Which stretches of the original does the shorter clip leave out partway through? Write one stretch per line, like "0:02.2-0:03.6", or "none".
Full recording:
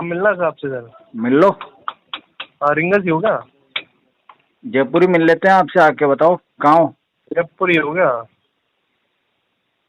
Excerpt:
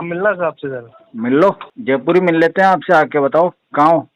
0:01.7-0:04.6

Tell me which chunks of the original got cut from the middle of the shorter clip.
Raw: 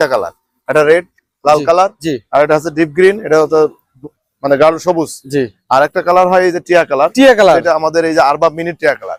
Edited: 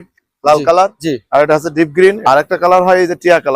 0:03.2-0:05.6

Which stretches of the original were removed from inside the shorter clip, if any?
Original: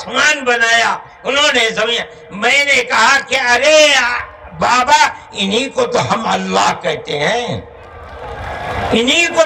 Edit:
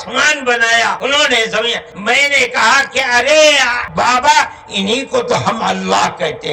0:01.0-0:01.2
0:02.1-0:02.2
0:04.1-0:04.4

